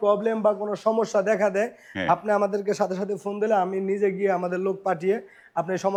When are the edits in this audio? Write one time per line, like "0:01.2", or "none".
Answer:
none